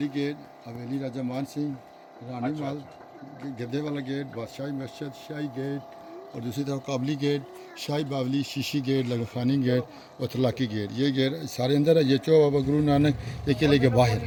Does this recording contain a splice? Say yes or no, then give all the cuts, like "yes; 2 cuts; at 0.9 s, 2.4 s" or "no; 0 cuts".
no; 0 cuts